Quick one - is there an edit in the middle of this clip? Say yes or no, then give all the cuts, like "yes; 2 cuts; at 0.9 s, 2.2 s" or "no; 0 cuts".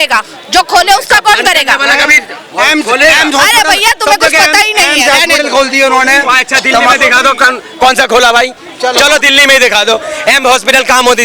no; 0 cuts